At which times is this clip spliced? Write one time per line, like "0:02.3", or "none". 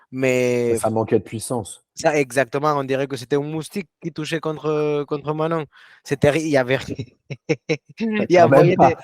none